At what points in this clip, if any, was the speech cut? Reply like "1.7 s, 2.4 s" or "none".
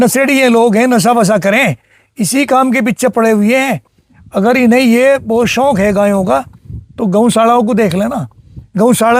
none